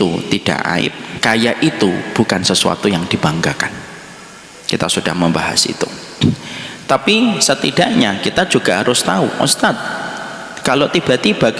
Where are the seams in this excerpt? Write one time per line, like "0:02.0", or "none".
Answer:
0:01.1